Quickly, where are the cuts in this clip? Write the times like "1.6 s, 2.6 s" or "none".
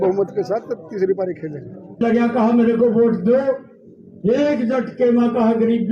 2.0 s